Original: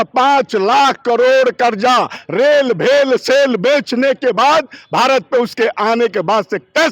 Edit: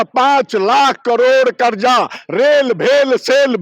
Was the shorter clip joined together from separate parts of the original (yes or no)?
no